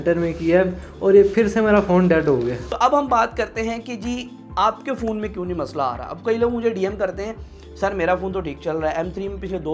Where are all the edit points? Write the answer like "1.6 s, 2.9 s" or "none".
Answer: 2.6 s

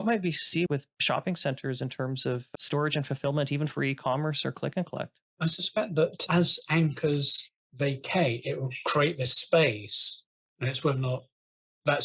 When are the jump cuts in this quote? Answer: none

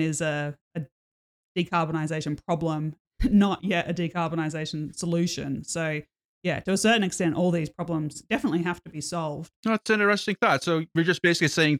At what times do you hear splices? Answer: 9.5 s

